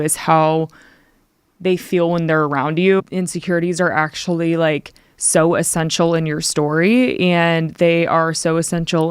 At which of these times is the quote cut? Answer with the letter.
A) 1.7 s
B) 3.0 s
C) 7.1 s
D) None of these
B